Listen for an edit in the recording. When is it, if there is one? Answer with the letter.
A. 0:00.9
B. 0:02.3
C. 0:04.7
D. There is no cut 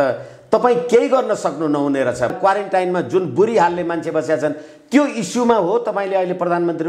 B